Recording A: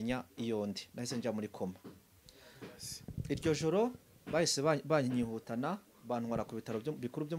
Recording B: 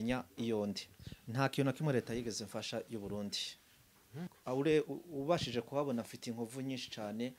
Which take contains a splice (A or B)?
B